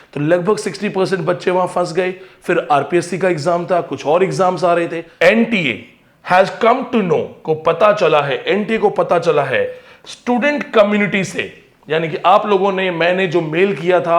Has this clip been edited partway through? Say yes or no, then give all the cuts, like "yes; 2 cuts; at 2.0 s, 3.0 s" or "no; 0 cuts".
yes; 1 cut; at 5.0 s